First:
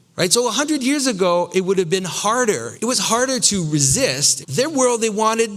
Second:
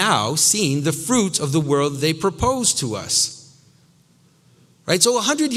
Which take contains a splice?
first; 2 cuts; at 2.7 s, 4.3 s

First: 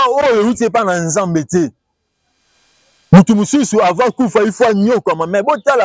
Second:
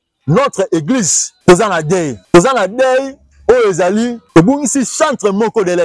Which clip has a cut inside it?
second; 3 cuts; at 1.2 s, 2.2 s, 4.2 s

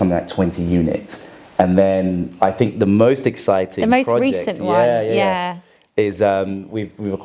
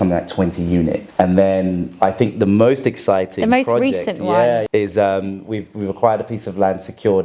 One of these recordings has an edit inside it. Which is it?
second; 2 cuts; at 1.0 s, 4.7 s

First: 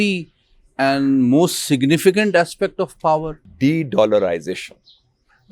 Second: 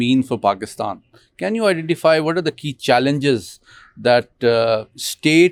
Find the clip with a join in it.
first; 1 cut; at 3.4 s

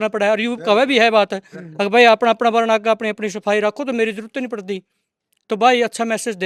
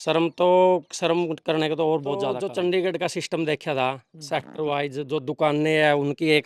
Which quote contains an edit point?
second; 1 cut; at 2.3 s

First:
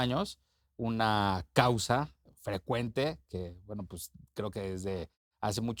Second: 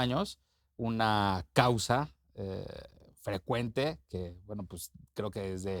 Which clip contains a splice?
first; 1 cut; at 2.2 s

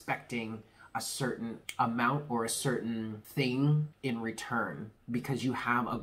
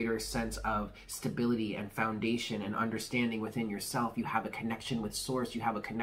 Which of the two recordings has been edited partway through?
first; 4 cuts; at 1.6 s, 3.2 s, 3.9 s, 4.9 s

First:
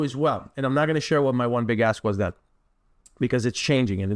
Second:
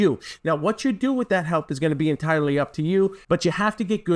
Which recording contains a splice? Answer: second; 1 cut; at 3.2 s

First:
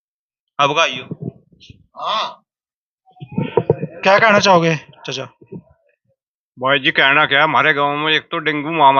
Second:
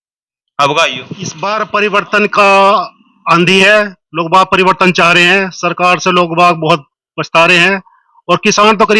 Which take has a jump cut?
second; 1 cut; at 1.4 s

